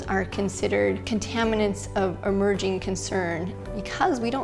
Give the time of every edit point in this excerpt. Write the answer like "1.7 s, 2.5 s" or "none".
3.5 s